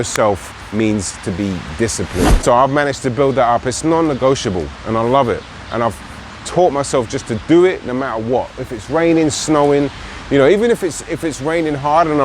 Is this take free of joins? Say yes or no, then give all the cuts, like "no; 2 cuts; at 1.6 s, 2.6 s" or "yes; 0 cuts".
no; 1 cut; at 2.4 s